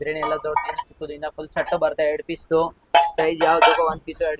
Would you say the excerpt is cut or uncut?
uncut